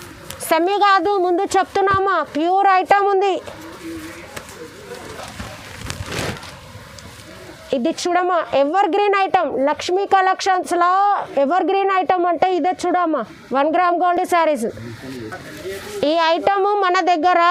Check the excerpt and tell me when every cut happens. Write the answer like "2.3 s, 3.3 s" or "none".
none